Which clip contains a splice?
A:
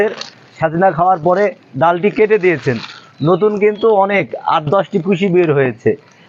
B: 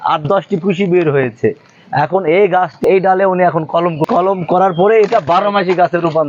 B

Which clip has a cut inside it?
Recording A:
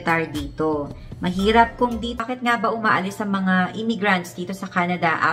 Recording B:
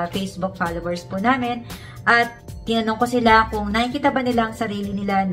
A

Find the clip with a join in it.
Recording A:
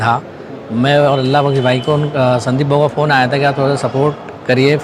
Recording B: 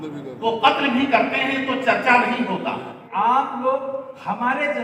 B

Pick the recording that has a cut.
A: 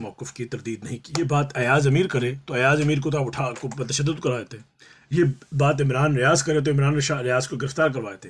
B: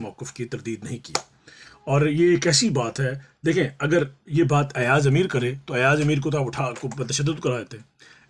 A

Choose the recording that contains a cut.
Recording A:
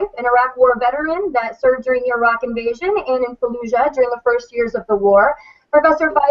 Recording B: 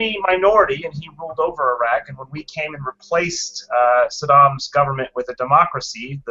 A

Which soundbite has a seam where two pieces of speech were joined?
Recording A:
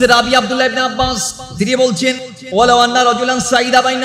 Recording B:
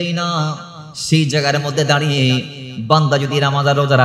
A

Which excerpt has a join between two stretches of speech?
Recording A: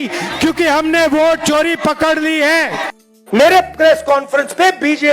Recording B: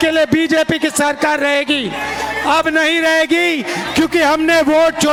A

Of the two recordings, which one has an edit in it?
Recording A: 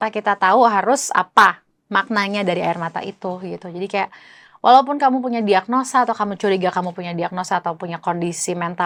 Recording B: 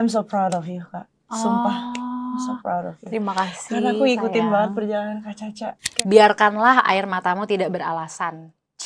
B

